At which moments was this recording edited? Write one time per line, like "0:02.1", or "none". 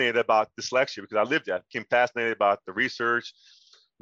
none